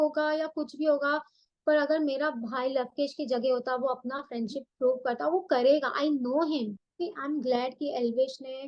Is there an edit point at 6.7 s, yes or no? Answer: yes